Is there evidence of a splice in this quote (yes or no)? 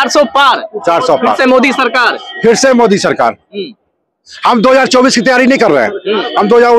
no